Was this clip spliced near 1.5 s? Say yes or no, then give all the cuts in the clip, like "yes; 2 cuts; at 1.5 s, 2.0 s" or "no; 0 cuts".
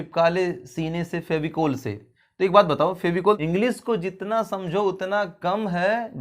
no; 1 cut; at 3.4 s